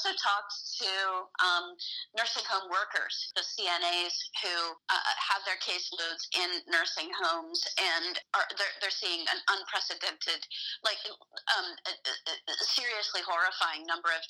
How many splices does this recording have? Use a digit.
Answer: 3